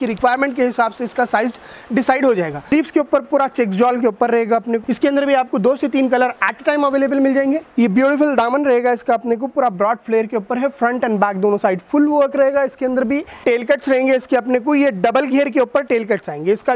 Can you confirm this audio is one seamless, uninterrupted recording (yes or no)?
no